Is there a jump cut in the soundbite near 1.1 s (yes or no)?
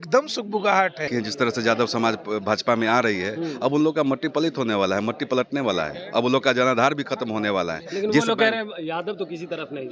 yes